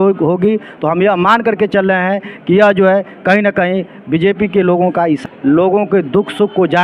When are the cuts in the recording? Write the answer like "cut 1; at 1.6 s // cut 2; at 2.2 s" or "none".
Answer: cut 1; at 5.2 s